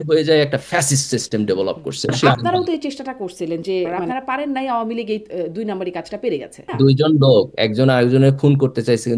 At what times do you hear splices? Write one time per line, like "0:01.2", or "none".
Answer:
0:02.2
0:04.0
0:06.7